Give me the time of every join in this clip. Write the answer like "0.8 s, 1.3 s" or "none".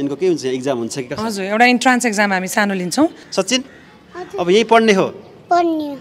3.2 s